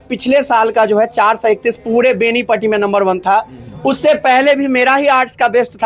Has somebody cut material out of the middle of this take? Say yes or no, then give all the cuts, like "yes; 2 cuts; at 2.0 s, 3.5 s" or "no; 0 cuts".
no; 0 cuts